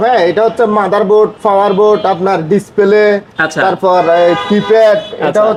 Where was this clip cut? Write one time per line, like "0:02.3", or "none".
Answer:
none

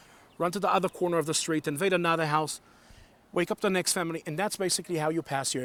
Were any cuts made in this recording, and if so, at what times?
none

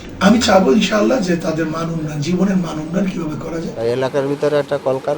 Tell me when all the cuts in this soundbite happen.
0:03.7

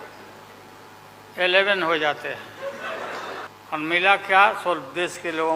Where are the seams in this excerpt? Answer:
0:03.5

